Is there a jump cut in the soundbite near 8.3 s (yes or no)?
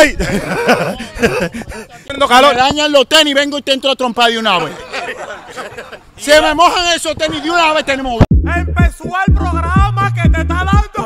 yes